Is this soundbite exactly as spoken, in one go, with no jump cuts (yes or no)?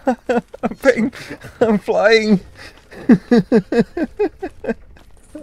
yes